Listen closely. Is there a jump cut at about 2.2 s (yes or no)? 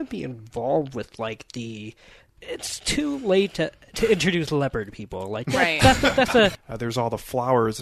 yes